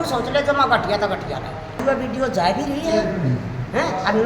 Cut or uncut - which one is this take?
cut